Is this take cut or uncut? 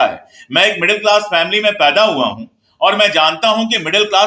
uncut